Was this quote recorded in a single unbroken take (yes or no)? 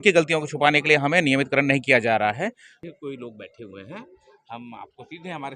no